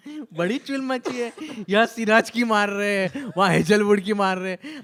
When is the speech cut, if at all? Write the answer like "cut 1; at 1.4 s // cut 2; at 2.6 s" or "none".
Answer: none

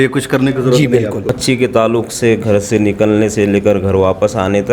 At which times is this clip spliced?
cut 1; at 1.2 s

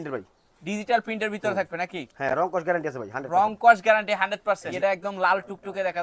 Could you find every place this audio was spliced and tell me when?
cut 1; at 4.7 s

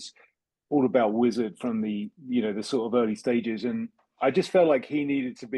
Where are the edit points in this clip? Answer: none

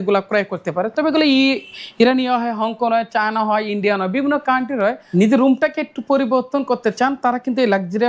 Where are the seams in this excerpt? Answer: cut 1; at 5.0 s

